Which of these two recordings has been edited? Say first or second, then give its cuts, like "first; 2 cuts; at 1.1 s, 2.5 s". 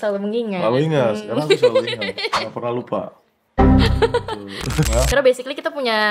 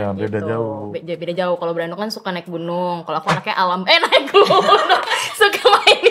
first; 1 cut; at 4.9 s